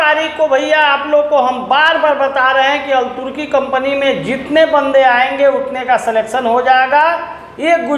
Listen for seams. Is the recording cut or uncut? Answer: uncut